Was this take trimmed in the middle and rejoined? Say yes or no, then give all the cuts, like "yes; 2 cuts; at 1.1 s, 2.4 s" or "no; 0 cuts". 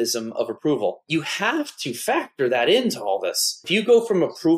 yes; 2 cuts; at 1.0 s, 3.6 s